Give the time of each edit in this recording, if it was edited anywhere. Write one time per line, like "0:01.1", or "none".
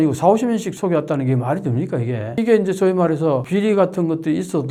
none